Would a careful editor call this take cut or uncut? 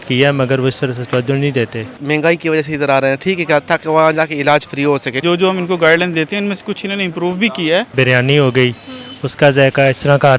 cut